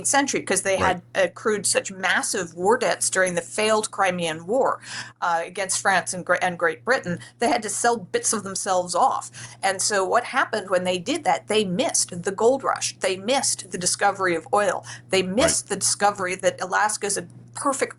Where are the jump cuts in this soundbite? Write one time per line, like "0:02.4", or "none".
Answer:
none